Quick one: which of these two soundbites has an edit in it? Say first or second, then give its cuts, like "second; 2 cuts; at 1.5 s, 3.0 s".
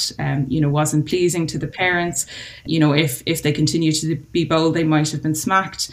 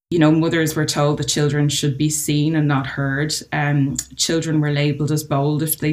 first; 1 cut; at 2.7 s